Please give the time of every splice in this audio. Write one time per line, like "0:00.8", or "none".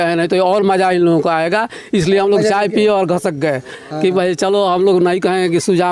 none